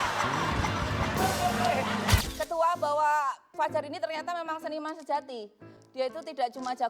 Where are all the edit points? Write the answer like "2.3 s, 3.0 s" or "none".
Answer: 2.2 s